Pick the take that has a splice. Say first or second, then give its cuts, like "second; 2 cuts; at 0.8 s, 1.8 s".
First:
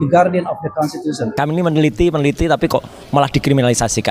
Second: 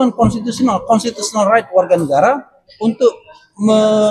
first; 1 cut; at 1.3 s